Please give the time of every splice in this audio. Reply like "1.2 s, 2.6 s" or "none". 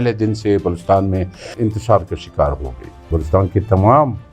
1.5 s, 3.2 s